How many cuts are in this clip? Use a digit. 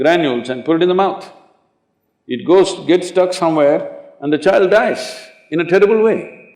0